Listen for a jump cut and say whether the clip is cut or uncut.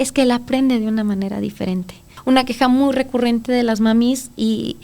cut